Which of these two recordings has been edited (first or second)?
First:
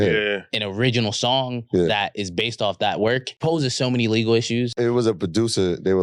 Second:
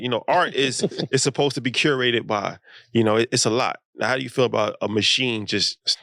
first